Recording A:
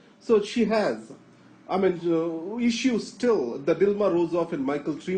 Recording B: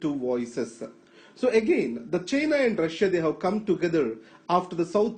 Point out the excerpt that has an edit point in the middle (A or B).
A